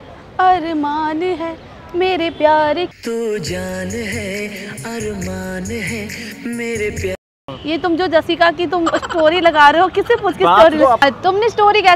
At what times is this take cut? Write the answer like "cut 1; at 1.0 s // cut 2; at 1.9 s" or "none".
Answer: cut 1; at 7.5 s // cut 2; at 11.0 s

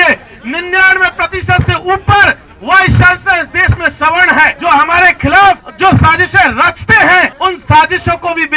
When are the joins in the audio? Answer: cut 1; at 4.6 s // cut 2; at 5.7 s // cut 3; at 7.3 s

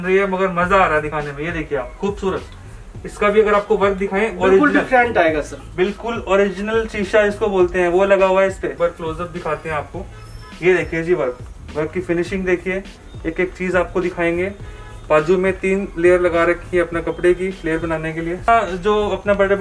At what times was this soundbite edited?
cut 1; at 8.7 s // cut 2; at 18.5 s

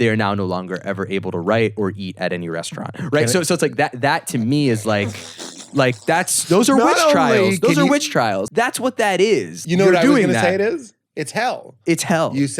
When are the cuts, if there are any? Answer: cut 1; at 8.4 s // cut 2; at 9.5 s

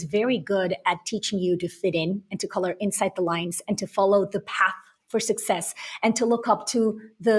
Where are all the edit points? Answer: none

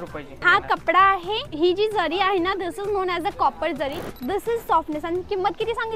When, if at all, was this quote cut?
cut 1; at 1.5 s // cut 2; at 4.2 s

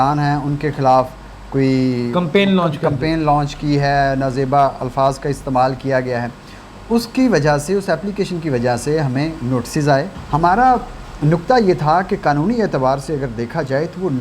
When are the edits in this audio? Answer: cut 1; at 10.2 s

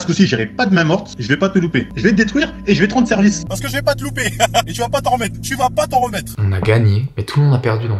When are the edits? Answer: cut 1; at 1.9 s // cut 2; at 3.4 s // cut 3; at 6.4 s

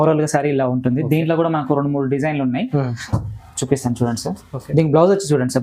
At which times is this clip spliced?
none

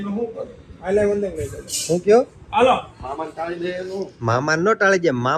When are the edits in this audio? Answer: none

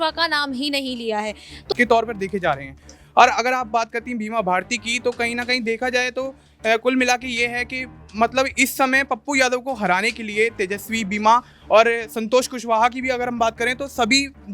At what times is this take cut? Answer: cut 1; at 1.6 s

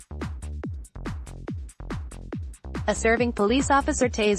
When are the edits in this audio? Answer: none

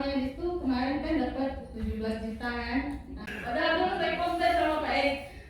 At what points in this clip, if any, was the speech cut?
cut 1; at 3.3 s

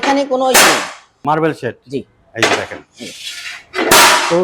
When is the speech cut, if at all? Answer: cut 1; at 1.2 s

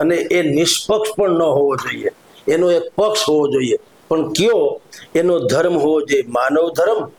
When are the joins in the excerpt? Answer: none

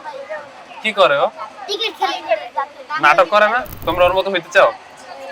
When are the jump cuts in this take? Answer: cut 1; at 3.7 s

